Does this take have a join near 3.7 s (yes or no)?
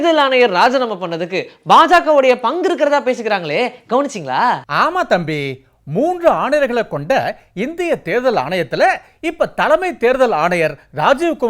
no